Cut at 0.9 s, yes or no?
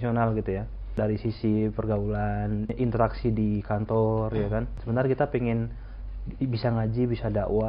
yes